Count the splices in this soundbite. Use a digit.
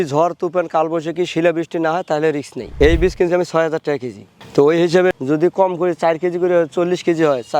2